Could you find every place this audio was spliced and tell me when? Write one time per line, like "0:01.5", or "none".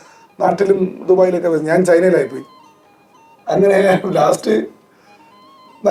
none

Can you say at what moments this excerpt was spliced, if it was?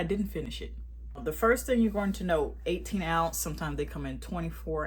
none

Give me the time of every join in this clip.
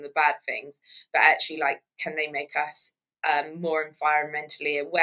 none

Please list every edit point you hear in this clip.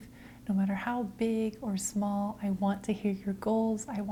none

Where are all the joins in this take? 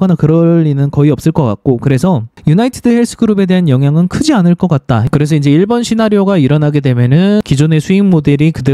0:05.0
0:07.4

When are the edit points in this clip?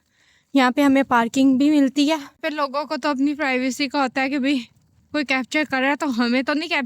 0:02.3

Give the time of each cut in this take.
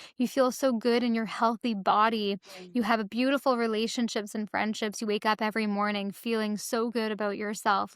none

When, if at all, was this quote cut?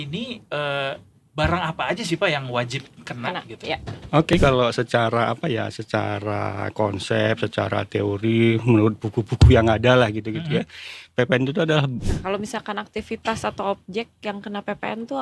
0:04.3
0:12.0

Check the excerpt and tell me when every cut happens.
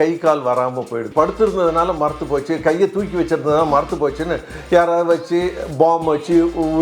0:01.1

